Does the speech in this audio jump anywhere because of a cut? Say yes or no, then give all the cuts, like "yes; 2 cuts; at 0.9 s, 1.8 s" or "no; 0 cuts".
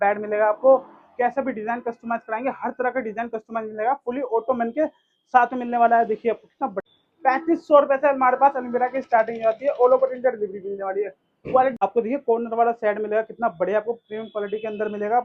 yes; 2 cuts; at 6.8 s, 11.8 s